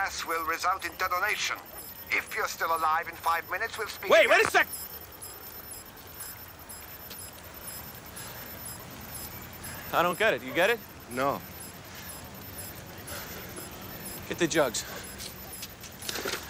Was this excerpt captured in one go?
no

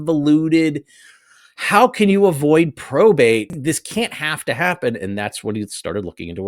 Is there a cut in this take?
yes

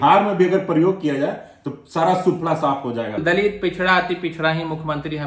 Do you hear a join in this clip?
yes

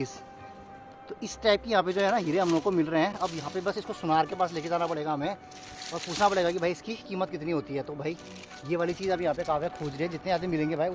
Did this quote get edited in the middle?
no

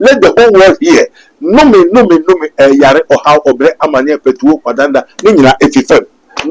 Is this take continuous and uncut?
yes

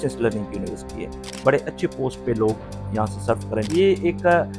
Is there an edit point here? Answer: yes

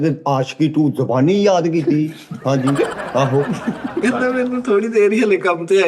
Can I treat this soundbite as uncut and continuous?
no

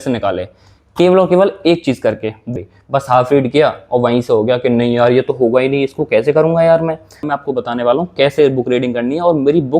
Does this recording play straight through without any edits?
no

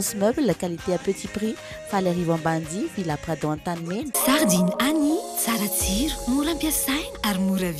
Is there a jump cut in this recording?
yes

